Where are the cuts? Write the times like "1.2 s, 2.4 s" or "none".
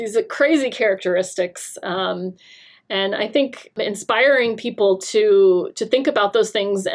3.8 s